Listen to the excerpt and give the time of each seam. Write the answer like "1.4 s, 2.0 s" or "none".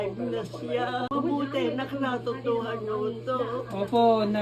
none

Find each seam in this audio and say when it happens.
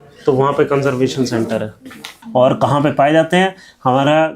2.1 s

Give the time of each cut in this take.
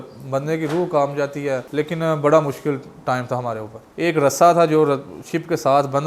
1.7 s, 3.9 s

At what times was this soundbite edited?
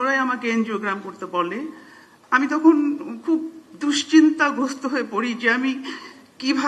none

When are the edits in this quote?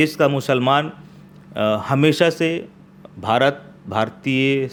none

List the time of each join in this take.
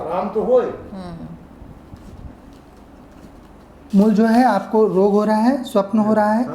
3.8 s

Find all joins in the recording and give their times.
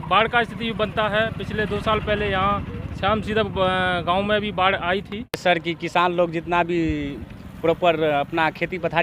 5.4 s

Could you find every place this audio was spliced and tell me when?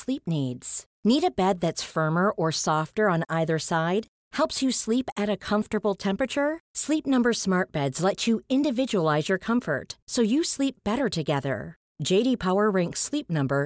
none

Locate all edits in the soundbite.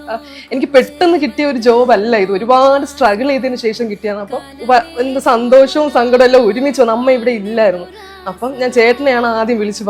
4.5 s

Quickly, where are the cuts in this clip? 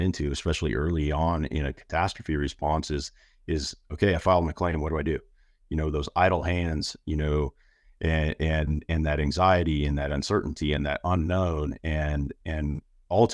none

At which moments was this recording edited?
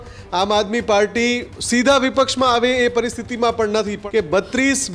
1.5 s, 4.0 s

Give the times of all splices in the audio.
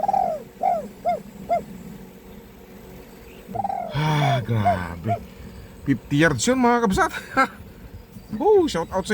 3.5 s

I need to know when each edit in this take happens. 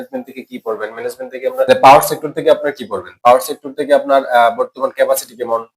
1.7 s

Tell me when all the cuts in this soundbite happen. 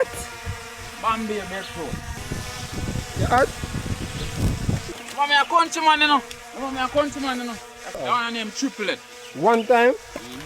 2.2 s, 4.8 s, 8.0 s

